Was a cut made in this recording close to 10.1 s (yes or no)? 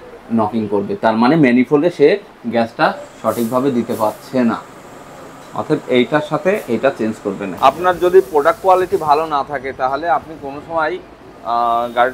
no